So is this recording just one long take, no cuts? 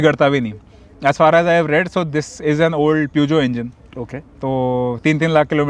yes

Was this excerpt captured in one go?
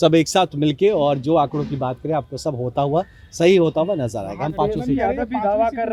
yes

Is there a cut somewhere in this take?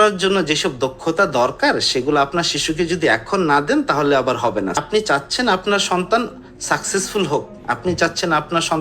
yes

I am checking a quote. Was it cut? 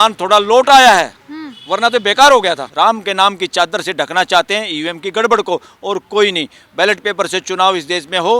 yes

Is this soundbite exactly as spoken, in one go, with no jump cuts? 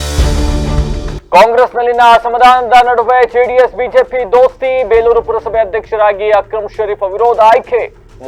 yes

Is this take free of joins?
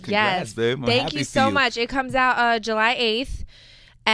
yes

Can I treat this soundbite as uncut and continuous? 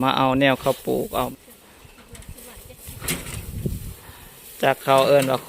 no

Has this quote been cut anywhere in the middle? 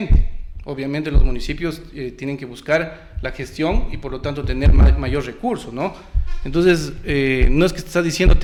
no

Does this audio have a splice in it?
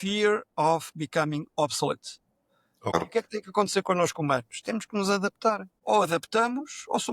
yes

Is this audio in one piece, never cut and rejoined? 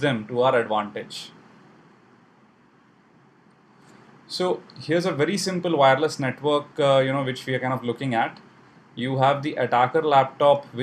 no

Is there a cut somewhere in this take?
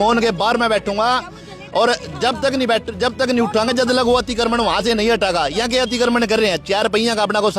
no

